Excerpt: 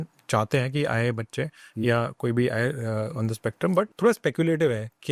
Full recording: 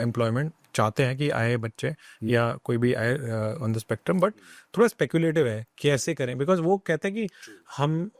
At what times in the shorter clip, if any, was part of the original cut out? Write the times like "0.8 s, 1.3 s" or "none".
3.9 s